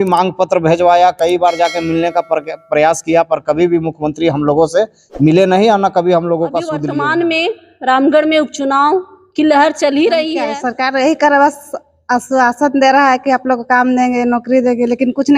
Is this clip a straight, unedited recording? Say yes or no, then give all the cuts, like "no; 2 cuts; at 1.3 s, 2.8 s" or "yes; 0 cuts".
no; 2 cuts; at 6.8 s, 10.6 s